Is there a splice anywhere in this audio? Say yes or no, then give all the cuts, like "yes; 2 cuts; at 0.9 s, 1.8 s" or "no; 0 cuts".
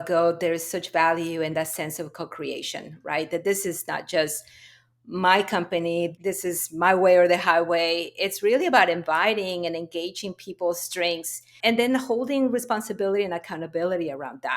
yes; 2 cuts; at 6.1 s, 11.5 s